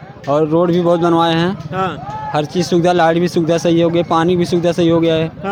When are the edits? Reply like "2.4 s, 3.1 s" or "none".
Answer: none